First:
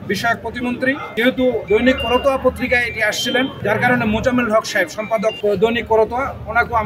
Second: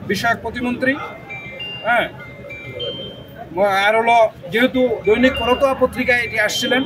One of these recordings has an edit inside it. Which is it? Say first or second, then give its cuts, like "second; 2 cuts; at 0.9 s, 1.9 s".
first; 3 cuts; at 1.1 s, 3.6 s, 5.4 s